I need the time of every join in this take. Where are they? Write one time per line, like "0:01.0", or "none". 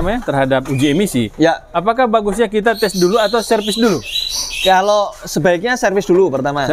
none